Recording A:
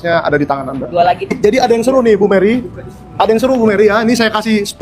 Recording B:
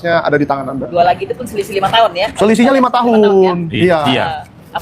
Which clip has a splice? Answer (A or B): A